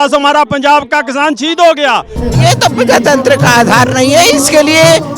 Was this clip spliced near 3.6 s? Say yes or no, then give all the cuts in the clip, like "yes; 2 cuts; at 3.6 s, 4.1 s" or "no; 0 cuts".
no; 1 cut; at 2.2 s